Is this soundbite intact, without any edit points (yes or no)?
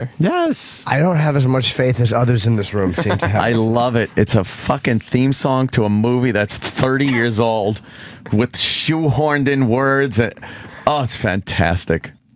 no